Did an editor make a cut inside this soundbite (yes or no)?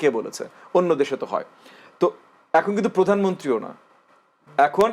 no